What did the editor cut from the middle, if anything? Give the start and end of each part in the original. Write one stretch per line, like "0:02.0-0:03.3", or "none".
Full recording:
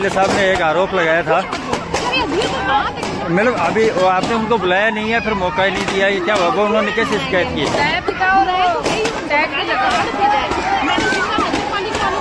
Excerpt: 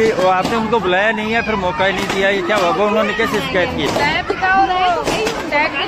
none